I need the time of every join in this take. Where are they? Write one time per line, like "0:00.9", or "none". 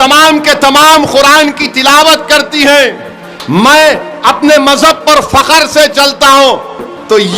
none